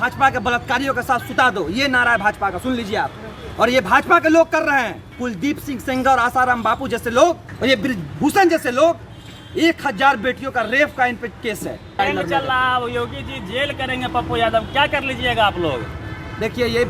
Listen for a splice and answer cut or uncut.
cut